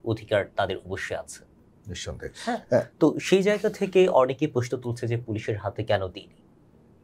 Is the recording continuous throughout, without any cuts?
yes; 0 cuts

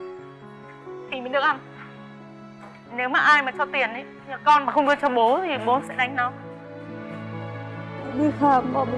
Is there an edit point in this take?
yes; 1 cut; at 8.0 s

